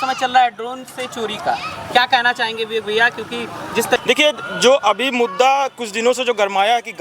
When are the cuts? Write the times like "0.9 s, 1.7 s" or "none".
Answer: 4.0 s